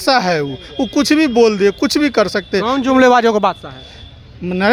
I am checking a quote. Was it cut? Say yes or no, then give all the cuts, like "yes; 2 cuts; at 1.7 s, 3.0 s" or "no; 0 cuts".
no; 0 cuts